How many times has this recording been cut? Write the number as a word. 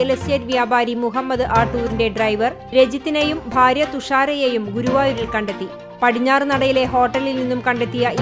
zero